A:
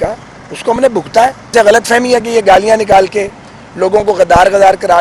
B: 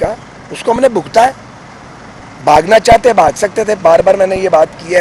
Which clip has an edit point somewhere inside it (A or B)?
A